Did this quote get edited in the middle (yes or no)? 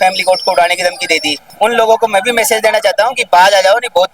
yes